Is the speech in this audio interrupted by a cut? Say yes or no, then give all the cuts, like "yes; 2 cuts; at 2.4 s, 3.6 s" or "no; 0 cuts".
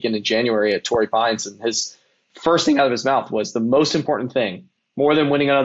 no; 0 cuts